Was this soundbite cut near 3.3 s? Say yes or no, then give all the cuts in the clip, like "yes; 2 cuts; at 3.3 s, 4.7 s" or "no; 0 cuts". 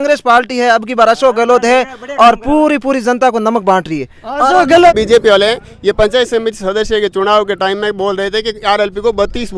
no; 1 cut; at 4.9 s